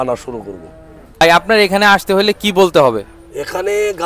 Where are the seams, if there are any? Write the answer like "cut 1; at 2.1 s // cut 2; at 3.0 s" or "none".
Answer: cut 1; at 1.2 s